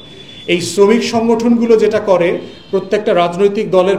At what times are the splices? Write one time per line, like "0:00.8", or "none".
none